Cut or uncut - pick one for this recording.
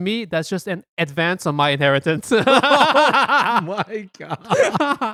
uncut